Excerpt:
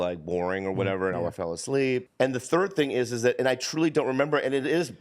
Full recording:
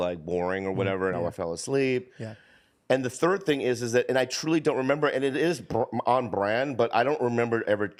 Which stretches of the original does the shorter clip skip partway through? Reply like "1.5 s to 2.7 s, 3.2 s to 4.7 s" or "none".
2.1 s to 2.8 s